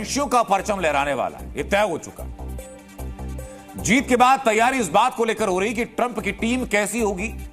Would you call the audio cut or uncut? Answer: uncut